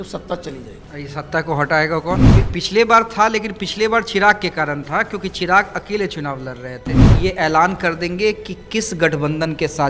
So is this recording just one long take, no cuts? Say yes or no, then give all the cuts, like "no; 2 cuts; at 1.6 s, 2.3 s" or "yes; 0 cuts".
no; 2 cuts; at 2.3 s, 7.0 s